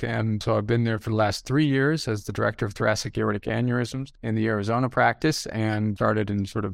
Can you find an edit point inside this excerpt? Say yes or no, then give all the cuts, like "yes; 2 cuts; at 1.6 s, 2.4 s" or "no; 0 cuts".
no; 0 cuts